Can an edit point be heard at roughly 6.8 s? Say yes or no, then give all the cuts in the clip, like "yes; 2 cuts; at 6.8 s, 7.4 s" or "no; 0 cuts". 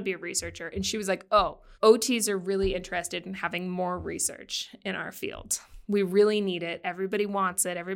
no; 1 cut; at 1.6 s